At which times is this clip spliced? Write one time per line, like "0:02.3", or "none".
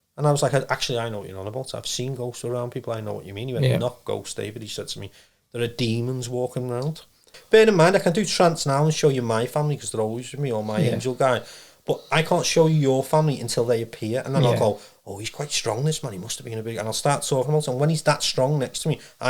0:07.3